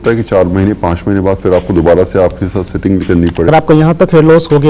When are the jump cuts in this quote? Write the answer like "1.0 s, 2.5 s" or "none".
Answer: 3.5 s